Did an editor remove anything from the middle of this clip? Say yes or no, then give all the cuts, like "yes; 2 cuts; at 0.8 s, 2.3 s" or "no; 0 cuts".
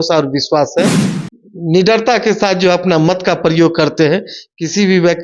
yes; 1 cut; at 1.1 s